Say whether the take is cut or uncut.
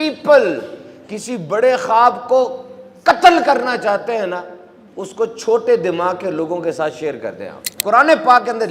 cut